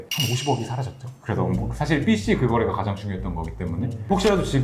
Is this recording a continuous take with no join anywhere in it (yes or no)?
yes